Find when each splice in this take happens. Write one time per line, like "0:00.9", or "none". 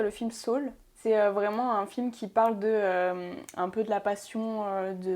0:00.9

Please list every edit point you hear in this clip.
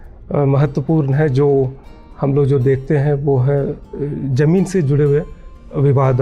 none

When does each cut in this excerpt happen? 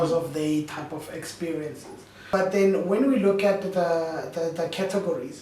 0:02.1

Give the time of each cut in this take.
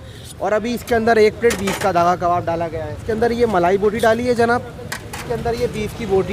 0:03.0
0:05.2

